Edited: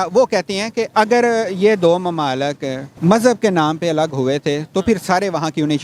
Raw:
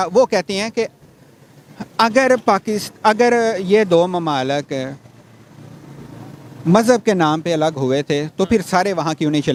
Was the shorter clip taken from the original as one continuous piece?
no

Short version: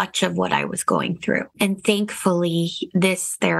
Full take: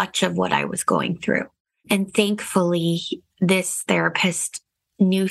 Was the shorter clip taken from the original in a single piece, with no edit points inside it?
no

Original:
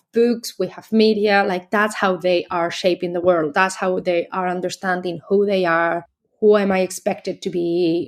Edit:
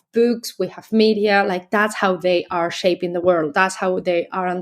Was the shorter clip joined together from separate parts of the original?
no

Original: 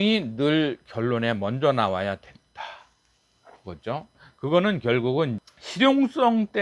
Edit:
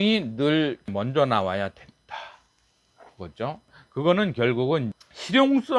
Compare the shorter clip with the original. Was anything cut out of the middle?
yes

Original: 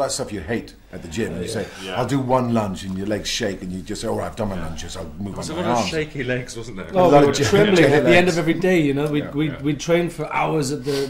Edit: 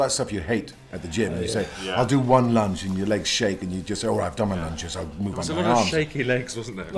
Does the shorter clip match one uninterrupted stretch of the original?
yes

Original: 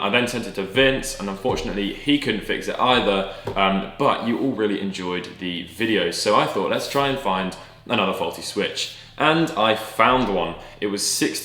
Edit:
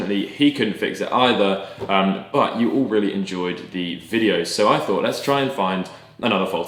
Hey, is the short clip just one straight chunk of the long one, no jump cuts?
yes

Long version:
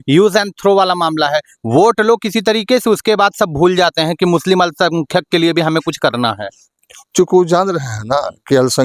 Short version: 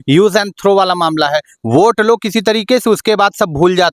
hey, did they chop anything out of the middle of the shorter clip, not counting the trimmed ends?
no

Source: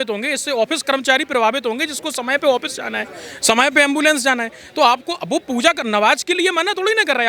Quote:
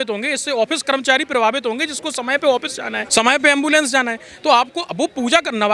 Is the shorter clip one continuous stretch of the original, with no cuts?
no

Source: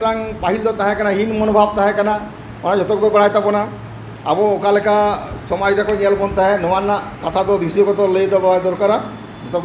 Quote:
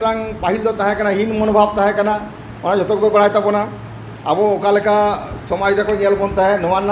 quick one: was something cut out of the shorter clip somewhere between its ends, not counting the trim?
no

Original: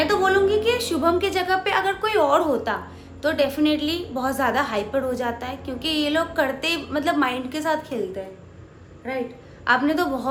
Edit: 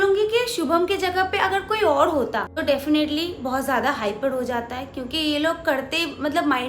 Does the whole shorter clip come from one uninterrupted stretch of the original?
no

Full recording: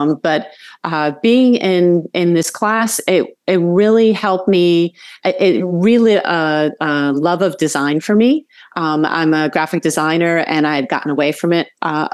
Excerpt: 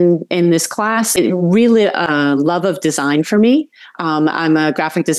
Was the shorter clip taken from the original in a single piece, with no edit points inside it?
no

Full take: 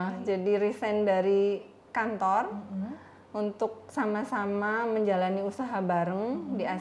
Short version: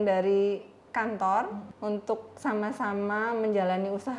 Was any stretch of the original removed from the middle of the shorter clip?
yes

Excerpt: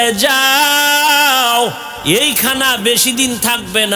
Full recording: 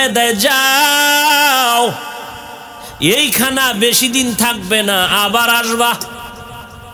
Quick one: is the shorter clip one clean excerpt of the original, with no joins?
no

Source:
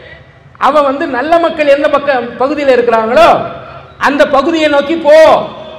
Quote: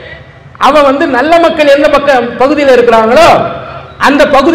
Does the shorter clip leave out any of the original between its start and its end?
no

